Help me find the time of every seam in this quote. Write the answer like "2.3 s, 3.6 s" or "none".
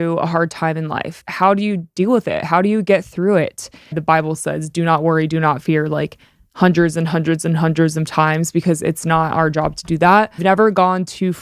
1.2 s, 4.0 s, 10.4 s